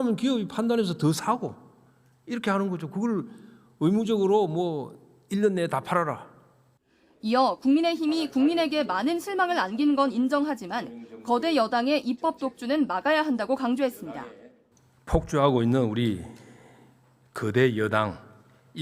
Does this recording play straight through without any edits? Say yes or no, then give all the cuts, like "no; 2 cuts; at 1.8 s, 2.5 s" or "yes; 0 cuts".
no; 1 cut; at 1.7 s